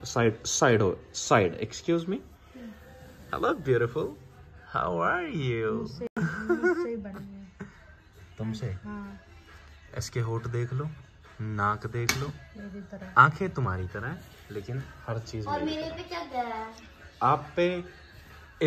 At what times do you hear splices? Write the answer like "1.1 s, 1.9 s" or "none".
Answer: none